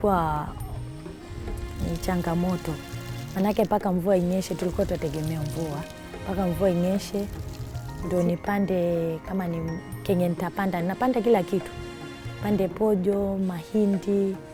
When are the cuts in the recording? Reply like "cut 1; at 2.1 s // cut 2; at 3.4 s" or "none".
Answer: none